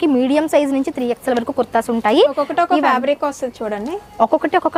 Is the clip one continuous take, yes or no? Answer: yes